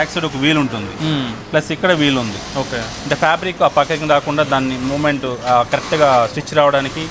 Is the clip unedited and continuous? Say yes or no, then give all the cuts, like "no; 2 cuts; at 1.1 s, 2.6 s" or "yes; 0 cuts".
yes; 0 cuts